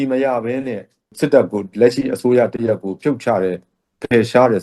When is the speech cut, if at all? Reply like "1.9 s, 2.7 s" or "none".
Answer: 1.1 s